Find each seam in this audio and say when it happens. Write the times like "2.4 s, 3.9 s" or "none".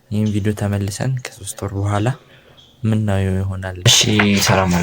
3.8 s